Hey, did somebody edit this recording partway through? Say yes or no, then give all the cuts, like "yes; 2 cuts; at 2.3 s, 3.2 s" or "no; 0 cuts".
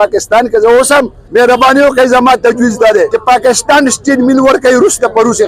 yes; 2 cuts; at 1.2 s, 3.2 s